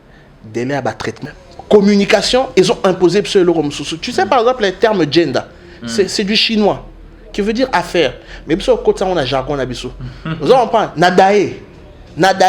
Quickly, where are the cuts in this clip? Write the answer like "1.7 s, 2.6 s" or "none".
1.2 s